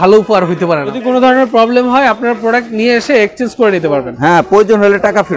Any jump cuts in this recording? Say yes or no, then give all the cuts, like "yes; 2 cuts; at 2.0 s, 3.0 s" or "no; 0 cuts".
yes; 1 cut; at 0.9 s